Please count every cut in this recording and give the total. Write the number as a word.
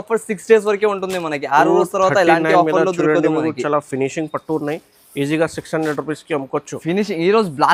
zero